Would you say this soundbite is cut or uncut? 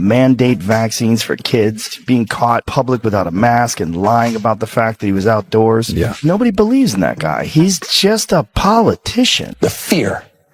cut